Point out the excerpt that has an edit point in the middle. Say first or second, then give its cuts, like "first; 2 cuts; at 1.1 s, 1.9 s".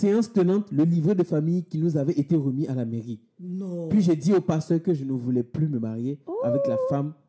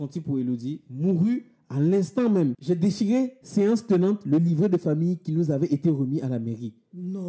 second; 1 cut; at 2.6 s